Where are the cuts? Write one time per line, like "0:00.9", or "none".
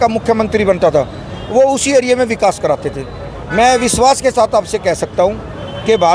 none